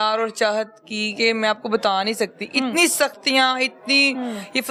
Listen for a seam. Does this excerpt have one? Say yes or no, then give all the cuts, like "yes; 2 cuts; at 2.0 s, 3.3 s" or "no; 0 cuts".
no; 0 cuts